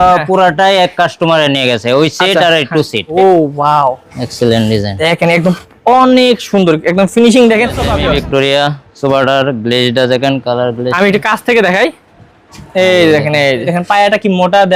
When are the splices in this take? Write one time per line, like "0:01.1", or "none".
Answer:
0:03.0
0:07.9
0:13.7

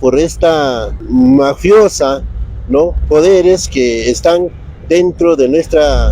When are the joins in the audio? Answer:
0:00.9

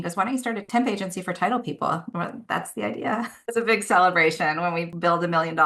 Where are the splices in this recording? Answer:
0:03.3

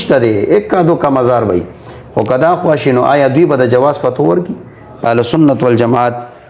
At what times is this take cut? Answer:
0:05.0

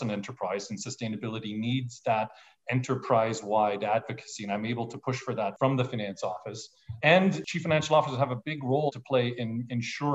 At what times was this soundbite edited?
0:05.5
0:07.4
0:08.9

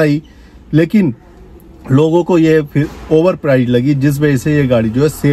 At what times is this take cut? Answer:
none

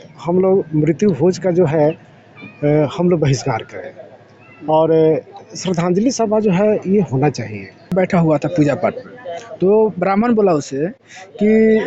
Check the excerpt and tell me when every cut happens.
0:07.9

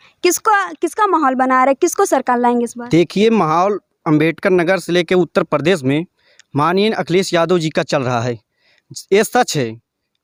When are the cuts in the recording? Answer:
none

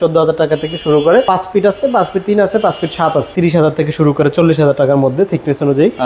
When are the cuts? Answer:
0:01.2
0:03.3

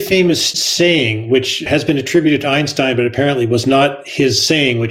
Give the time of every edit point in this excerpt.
0:01.7

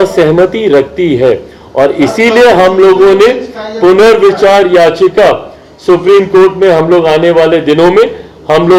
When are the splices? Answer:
none

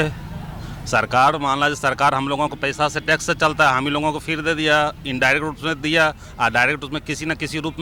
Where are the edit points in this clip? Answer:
none

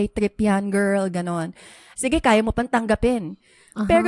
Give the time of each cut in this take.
0:01.9

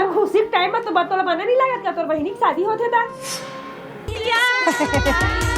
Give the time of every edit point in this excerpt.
0:04.1

